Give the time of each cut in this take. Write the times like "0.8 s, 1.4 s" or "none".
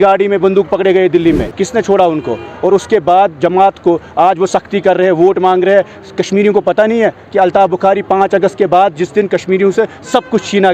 1.6 s